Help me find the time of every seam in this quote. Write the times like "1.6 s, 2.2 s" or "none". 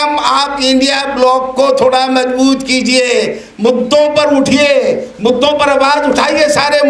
none